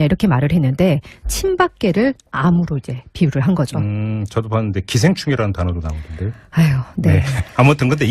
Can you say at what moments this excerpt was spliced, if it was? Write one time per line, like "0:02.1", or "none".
none